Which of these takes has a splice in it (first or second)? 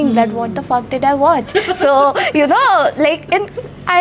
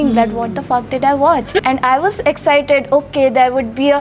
second